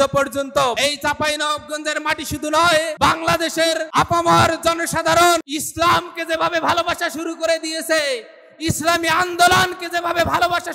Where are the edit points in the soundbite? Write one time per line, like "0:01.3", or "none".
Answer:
0:00.8
0:02.9
0:03.9
0:05.6